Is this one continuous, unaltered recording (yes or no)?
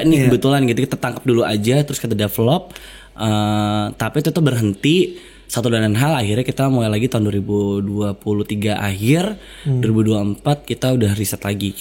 yes